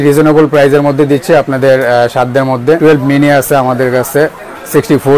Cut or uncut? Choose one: cut